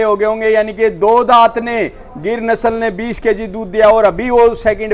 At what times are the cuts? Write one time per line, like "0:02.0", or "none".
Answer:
none